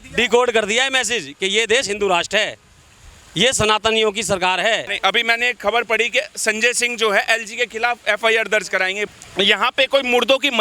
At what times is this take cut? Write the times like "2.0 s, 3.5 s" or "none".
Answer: 4.9 s, 9.1 s